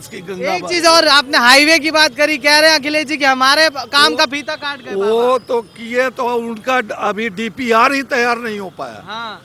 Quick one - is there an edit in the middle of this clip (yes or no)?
no